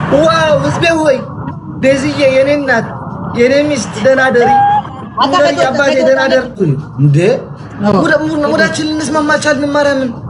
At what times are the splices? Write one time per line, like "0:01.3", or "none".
0:06.6